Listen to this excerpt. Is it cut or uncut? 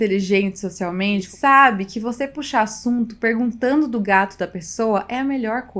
cut